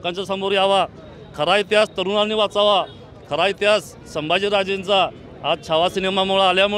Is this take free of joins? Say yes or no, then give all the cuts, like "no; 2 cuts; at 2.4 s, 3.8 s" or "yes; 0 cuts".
yes; 0 cuts